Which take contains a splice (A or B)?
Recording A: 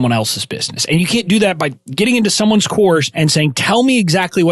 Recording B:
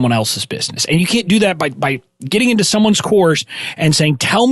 A